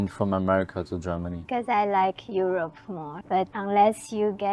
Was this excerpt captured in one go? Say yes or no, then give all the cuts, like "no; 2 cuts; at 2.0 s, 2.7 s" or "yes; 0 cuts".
no; 2 cuts; at 1.4 s, 3.3 s